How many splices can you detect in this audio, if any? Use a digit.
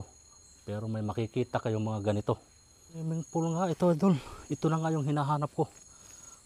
1